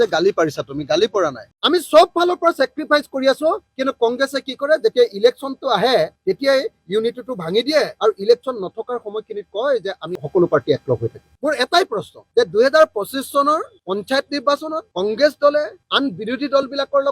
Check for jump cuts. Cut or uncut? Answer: cut